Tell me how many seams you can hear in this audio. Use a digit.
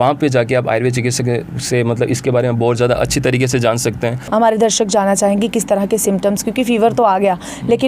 1